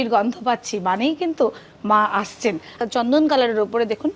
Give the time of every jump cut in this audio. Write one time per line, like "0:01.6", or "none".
0:02.8